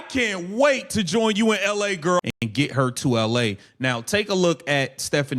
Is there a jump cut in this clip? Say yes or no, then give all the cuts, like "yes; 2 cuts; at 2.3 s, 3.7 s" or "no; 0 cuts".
yes; 1 cut; at 2.2 s